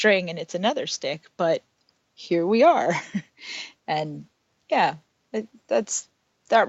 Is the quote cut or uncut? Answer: uncut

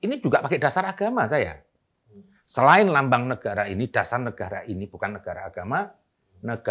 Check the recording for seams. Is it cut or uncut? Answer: uncut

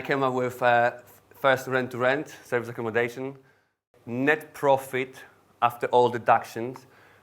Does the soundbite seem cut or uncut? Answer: cut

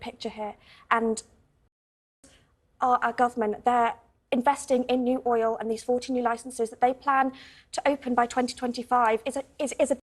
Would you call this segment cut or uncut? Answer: uncut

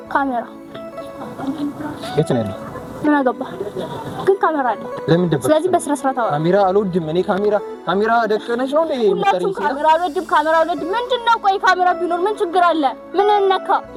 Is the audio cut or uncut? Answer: uncut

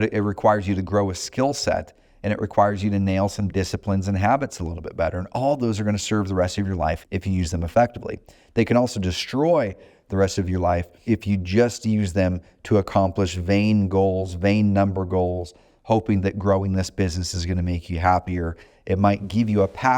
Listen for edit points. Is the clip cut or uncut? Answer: cut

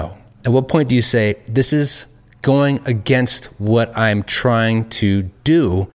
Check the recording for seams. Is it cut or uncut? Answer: uncut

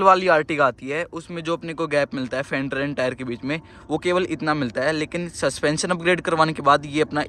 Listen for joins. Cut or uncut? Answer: uncut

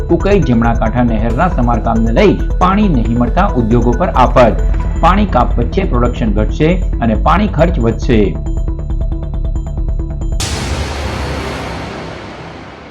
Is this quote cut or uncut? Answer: cut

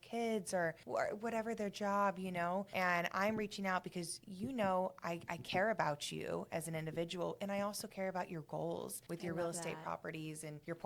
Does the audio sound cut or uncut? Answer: uncut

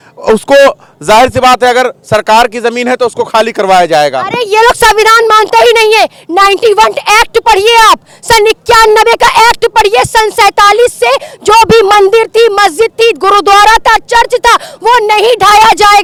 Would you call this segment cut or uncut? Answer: uncut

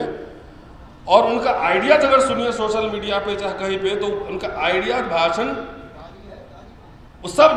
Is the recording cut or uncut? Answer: uncut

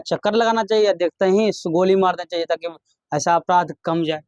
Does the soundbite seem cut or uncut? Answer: uncut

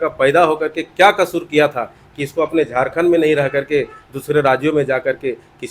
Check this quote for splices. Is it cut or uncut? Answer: uncut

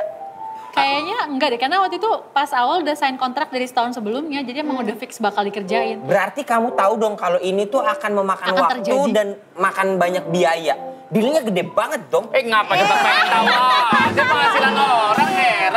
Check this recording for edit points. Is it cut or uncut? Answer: uncut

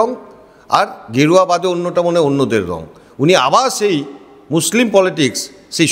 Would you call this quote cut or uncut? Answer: uncut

